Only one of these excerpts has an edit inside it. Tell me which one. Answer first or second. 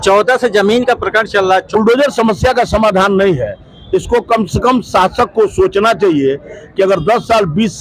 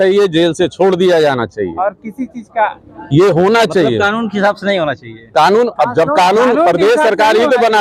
first